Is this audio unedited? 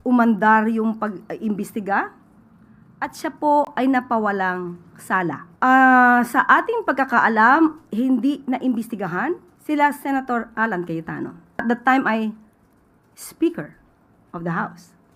no; 3 cuts; at 5.5 s, 9.5 s, 11.4 s

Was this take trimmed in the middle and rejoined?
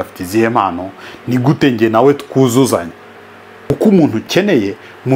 yes; 1 cut; at 3.5 s

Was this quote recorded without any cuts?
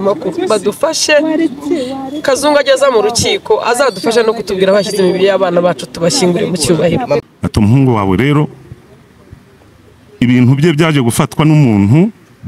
no; 1 cut; at 7.3 s

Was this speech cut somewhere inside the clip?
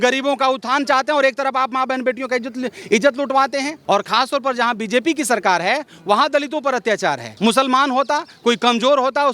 yes; 2 cuts; at 3.8 s, 7.3 s

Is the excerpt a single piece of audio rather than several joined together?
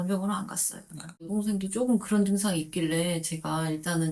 no; 1 cut; at 1.3 s

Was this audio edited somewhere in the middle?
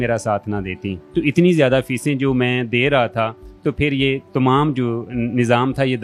no; 0 cuts

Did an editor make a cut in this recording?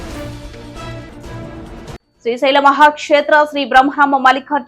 yes; 1 cut; at 1.9 s

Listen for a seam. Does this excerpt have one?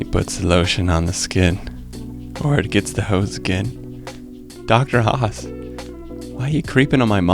no; 0 cuts

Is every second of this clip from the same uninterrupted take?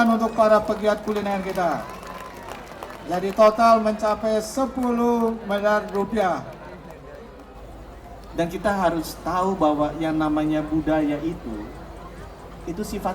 no; 1 cut; at 7.5 s

